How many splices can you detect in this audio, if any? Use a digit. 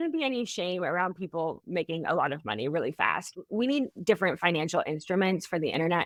0